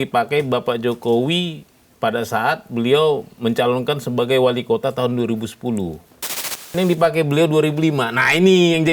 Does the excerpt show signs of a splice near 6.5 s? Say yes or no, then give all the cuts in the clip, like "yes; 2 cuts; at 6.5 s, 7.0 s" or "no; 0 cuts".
yes; 1 cut; at 6.5 s